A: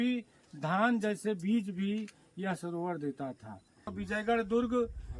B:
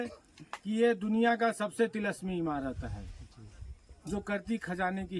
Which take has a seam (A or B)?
A